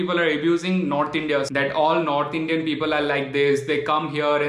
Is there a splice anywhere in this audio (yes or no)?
yes